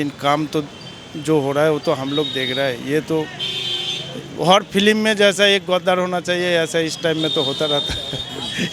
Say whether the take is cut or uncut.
uncut